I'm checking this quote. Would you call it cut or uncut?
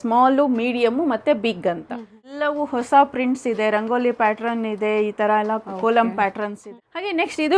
cut